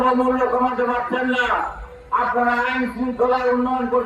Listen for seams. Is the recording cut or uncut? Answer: uncut